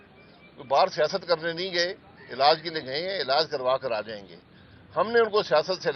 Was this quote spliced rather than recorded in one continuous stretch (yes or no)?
no